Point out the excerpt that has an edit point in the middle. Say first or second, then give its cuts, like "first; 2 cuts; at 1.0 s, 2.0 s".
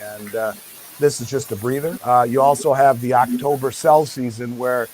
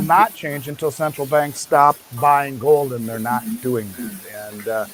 first; 1 cut; at 2.0 s